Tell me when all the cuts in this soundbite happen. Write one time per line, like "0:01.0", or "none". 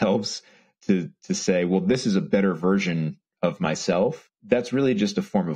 0:04.3